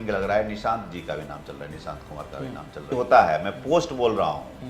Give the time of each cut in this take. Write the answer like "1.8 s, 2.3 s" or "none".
2.9 s